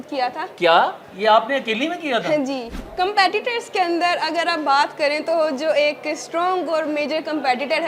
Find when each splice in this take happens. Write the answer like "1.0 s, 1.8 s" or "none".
2.8 s